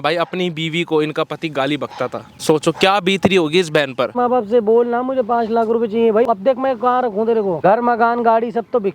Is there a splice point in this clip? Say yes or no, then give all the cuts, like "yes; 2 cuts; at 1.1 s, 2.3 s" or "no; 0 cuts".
yes; 4 cuts; at 2.3 s, 4.1 s, 6.3 s, 7.6 s